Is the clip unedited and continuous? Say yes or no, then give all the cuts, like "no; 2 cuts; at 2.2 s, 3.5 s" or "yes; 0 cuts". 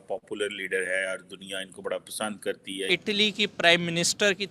no; 1 cut; at 2.9 s